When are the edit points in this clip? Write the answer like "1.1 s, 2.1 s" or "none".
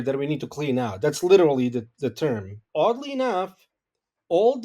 2.6 s